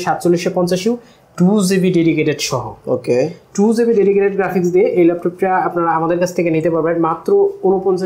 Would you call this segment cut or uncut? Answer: uncut